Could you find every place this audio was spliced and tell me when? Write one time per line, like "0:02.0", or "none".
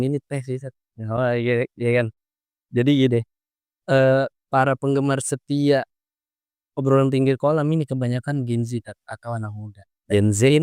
none